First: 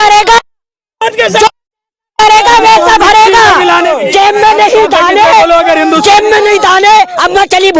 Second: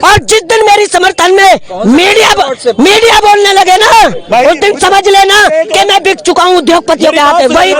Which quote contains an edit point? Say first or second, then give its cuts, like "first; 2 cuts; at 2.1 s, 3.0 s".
first; 1 cut; at 3.9 s